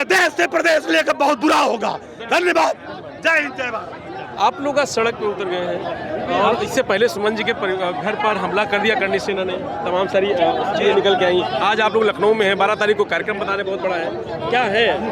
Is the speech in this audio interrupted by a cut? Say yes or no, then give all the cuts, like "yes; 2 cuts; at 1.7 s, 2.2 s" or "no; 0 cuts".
no; 0 cuts